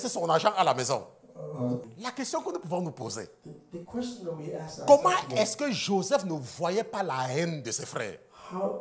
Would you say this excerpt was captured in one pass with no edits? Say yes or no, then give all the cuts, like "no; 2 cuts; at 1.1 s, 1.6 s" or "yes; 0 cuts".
no; 1 cut; at 1.9 s